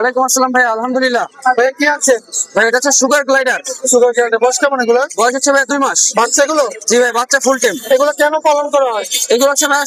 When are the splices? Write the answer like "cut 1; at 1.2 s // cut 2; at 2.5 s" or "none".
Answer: none